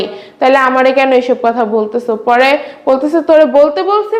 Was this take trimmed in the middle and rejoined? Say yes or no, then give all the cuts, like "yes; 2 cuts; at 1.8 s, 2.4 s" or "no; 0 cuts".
no; 0 cuts